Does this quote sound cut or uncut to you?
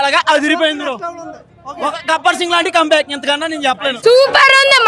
cut